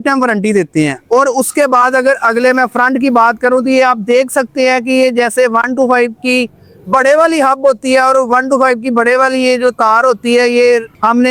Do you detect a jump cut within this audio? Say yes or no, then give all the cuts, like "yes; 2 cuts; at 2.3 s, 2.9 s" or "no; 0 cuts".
no; 0 cuts